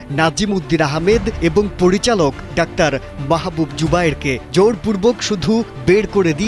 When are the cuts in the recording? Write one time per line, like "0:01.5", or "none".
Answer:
0:02.4